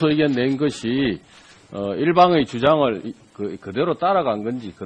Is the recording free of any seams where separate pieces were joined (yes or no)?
yes